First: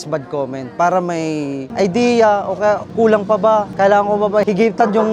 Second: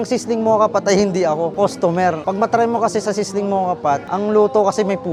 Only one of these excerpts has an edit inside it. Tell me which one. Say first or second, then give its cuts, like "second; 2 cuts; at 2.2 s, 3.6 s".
first; 1 cut; at 1.2 s